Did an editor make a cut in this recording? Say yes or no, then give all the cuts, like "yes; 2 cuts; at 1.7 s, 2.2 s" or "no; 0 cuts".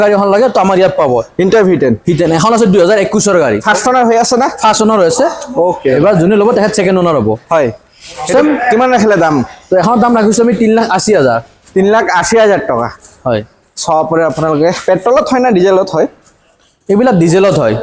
no; 0 cuts